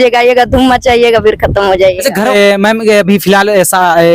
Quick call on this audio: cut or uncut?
cut